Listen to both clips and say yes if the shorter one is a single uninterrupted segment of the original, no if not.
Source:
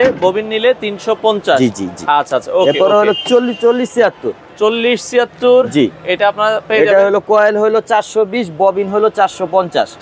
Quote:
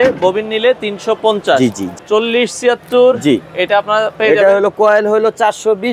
no